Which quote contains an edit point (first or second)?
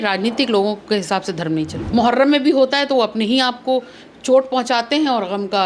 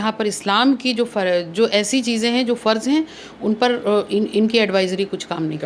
first